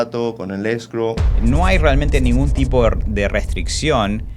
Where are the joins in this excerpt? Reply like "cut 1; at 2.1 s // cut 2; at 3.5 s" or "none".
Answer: cut 1; at 1.3 s